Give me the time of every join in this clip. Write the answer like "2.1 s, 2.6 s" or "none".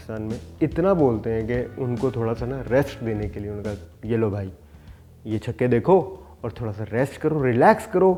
none